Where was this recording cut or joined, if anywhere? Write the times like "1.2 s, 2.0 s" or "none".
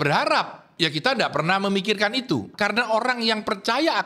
2.5 s